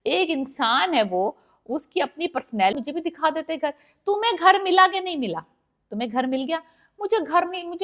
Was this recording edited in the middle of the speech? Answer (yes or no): yes